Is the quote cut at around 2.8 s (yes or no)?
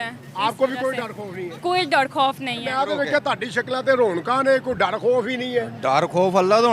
yes